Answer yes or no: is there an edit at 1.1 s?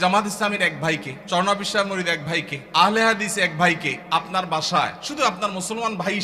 yes